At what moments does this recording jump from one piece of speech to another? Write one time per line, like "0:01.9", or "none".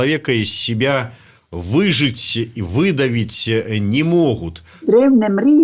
0:04.7